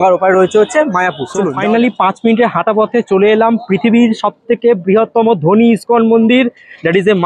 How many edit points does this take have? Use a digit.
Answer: 1